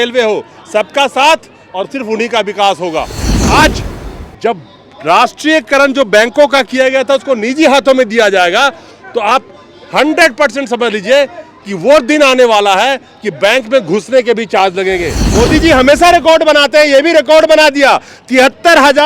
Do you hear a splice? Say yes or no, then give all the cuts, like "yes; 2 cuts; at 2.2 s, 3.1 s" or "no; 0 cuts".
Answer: yes; 2 cuts; at 3.3 s, 15.2 s